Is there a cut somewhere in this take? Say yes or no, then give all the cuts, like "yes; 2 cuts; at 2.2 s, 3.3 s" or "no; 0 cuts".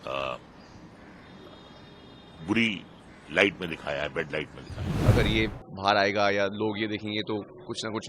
yes; 1 cut; at 4.9 s